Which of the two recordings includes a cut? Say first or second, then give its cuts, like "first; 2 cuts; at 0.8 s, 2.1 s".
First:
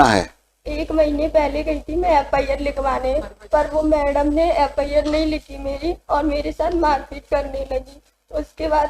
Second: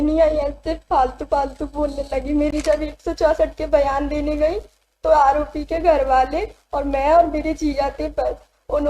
second; 1 cut; at 2.5 s